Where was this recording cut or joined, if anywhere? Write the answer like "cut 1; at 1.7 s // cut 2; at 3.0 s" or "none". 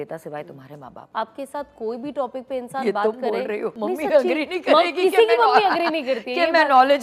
cut 1; at 1.0 s // cut 2; at 3.7 s